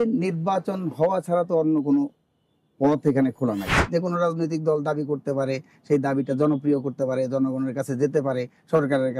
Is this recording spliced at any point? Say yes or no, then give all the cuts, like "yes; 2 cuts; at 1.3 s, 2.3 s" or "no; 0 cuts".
yes; 1 cut; at 3.8 s